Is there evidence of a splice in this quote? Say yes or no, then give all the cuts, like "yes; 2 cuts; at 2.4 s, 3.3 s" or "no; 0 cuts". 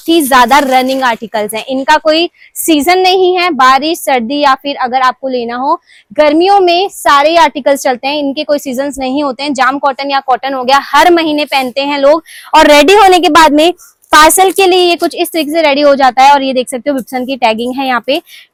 no; 0 cuts